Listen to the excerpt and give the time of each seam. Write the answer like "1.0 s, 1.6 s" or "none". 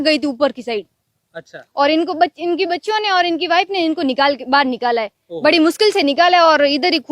none